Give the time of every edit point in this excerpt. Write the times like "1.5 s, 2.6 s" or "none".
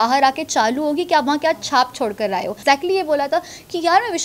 2.5 s